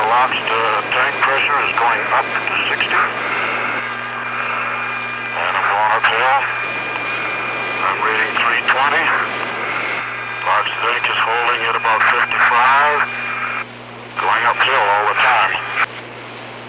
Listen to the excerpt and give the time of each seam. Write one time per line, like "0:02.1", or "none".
0:03.0